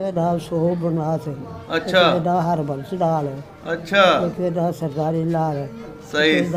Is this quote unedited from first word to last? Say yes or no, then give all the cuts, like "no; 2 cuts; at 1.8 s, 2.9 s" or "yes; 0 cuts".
yes; 0 cuts